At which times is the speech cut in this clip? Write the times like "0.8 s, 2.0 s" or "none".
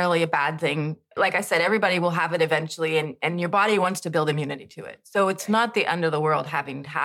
1.2 s